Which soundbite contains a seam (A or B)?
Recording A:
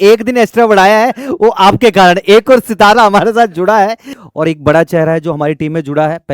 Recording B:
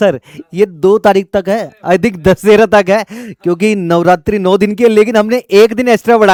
A